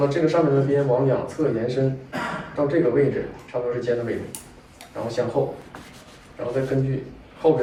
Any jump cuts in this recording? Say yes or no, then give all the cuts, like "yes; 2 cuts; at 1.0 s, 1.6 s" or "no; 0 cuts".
no; 0 cuts